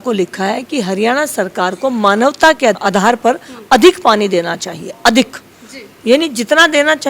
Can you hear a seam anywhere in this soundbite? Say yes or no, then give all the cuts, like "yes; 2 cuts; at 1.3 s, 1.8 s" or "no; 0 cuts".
yes; 1 cut; at 2.8 s